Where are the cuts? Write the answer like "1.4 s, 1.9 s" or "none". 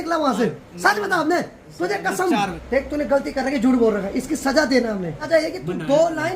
2.6 s, 5.3 s